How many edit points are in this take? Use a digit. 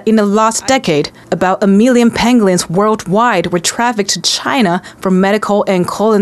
0